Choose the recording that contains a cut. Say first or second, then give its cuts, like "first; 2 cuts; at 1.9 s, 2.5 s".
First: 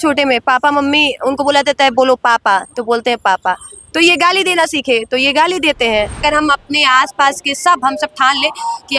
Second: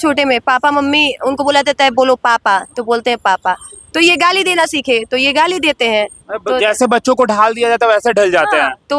first; 1 cut; at 6.2 s